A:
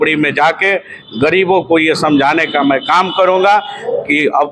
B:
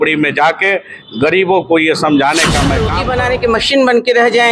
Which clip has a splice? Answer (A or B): B